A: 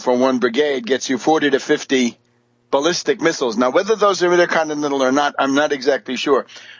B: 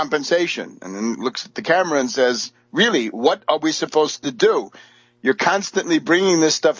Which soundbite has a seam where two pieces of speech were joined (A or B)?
B